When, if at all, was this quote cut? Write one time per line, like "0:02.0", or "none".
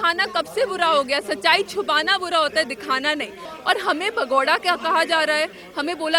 0:03.4